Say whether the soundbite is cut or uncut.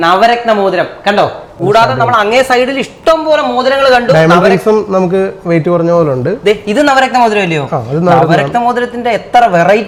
uncut